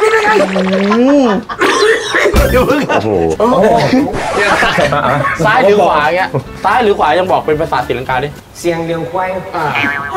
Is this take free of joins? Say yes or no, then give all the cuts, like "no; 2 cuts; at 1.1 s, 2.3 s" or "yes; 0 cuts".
no; 1 cut; at 3.3 s